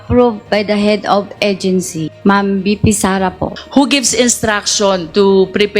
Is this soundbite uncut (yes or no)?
yes